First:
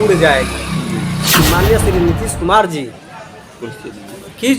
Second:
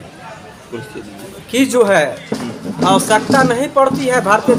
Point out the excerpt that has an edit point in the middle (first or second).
first